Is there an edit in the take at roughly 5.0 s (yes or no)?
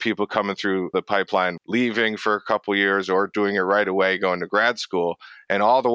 no